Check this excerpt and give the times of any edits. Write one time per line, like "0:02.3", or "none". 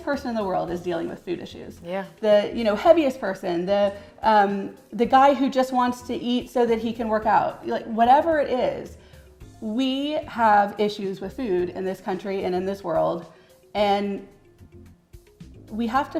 none